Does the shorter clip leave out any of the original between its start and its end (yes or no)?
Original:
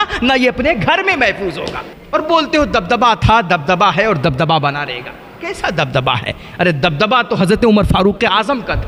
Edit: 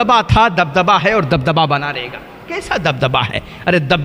no